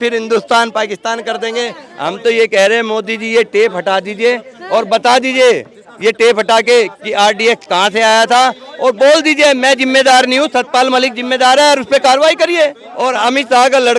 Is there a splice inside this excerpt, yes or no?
yes